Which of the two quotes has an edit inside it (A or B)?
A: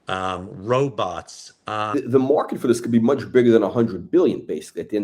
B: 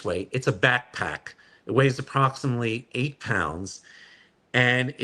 A